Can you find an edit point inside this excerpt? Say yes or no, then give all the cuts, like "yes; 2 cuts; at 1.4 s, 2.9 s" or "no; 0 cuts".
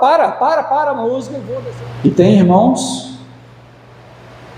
yes; 1 cut; at 1.4 s